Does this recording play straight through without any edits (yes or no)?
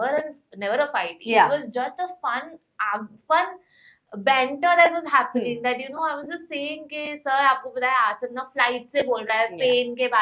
yes